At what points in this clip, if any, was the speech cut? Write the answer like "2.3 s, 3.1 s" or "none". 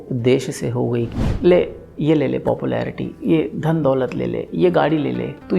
1.1 s